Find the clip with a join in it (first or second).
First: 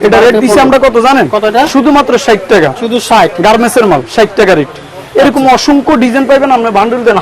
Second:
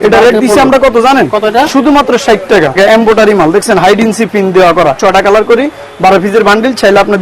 second